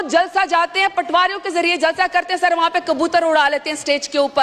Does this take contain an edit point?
no; 0 cuts

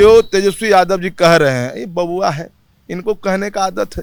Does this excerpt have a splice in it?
no; 0 cuts

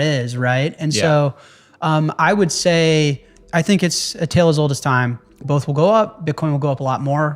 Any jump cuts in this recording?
yes; 1 cut; at 3.4 s

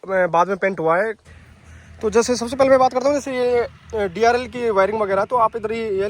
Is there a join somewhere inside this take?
yes; 1 cut; at 1.3 s

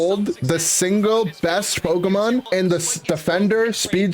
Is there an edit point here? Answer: yes; 1 cut; at 2.4 s

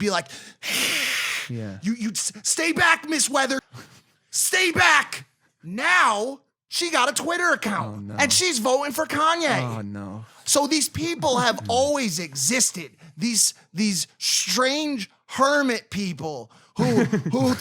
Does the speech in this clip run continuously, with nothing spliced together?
no; 1 cut; at 3.6 s

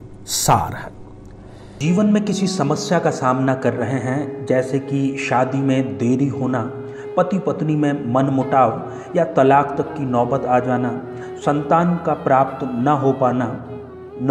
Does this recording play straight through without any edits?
yes; 0 cuts

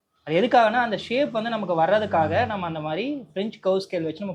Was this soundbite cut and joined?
no; 0 cuts

